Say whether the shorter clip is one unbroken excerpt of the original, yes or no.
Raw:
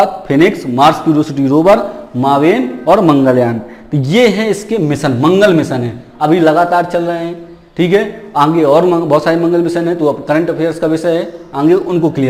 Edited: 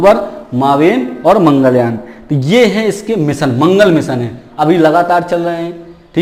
yes